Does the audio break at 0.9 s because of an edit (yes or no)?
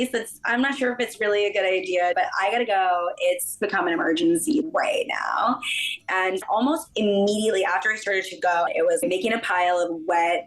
no